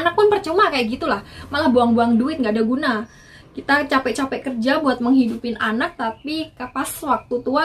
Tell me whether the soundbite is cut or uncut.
uncut